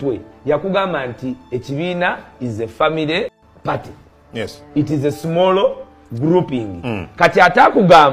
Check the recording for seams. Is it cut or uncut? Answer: cut